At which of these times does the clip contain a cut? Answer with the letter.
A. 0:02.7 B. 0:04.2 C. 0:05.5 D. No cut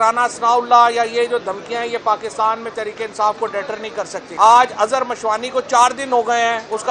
B